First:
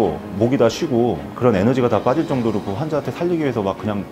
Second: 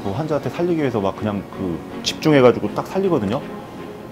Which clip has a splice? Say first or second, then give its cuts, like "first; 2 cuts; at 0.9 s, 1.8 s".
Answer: first; 1 cut; at 1.3 s